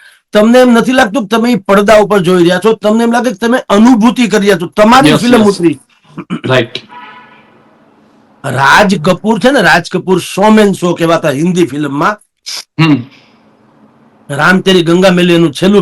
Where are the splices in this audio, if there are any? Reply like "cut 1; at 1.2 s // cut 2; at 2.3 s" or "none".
none